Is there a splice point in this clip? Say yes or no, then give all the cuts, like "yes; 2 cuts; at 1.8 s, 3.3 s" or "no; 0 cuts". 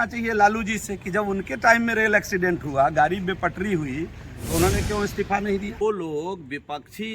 yes; 1 cut; at 5.8 s